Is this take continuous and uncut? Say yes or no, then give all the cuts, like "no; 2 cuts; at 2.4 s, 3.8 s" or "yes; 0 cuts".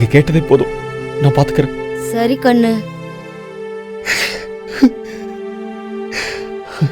no; 1 cut; at 3.3 s